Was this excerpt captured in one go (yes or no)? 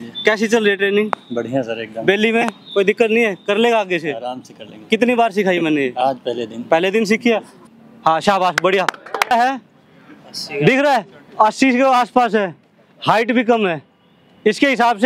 no